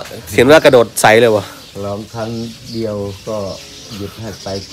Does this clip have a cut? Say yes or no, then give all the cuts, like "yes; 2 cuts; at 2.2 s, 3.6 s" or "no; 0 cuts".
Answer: no; 0 cuts